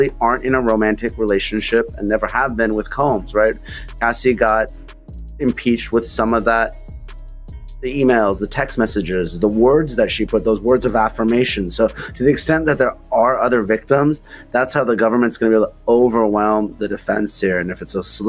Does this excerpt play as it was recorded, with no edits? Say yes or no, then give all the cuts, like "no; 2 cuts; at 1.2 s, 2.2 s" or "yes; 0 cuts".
yes; 0 cuts